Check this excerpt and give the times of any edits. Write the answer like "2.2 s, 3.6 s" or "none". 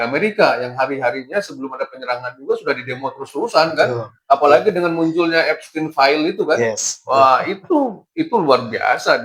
none